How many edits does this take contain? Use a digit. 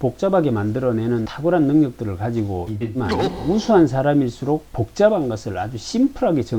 1